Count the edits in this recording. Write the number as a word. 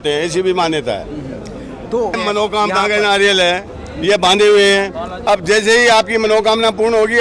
one